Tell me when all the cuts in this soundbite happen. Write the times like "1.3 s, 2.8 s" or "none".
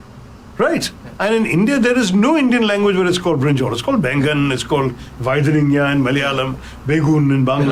none

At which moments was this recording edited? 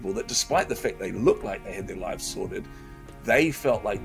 none

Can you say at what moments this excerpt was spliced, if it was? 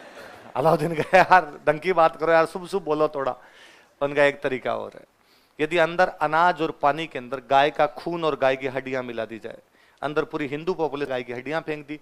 11.1 s

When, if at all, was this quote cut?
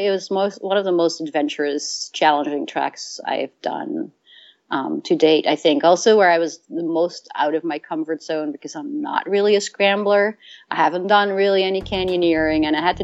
none

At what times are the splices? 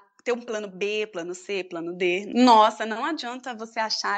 2.3 s

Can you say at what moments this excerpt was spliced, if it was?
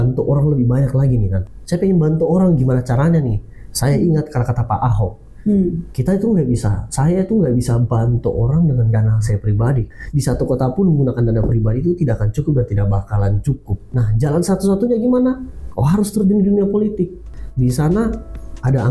1.4 s, 9.9 s, 13.9 s, 17.3 s

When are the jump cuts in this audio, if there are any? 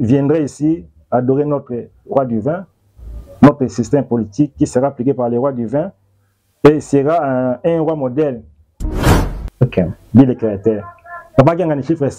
8.9 s

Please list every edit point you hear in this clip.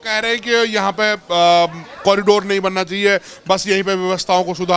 none

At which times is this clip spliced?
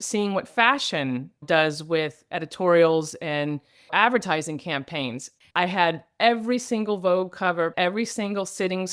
5.3 s, 7.7 s

